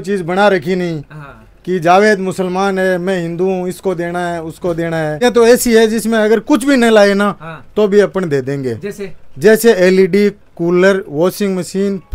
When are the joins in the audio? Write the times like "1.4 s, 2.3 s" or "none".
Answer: 5.2 s